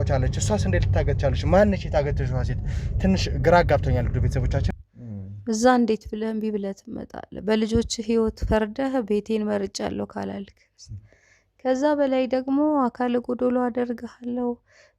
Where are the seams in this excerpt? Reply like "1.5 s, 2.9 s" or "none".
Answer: 4.7 s